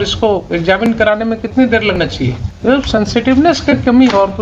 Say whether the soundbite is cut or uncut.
cut